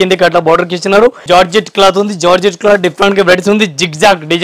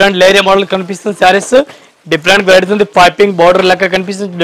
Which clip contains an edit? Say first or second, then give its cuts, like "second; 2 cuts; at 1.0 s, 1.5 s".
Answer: first; 1 cut; at 1.2 s